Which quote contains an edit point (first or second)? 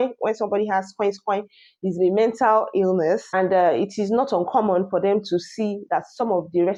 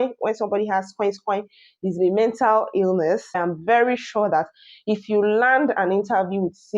second